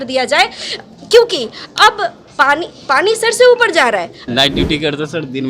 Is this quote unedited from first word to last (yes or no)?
no